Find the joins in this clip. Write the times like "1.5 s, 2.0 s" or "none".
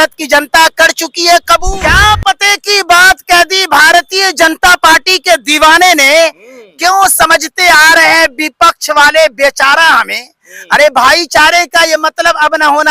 1.7 s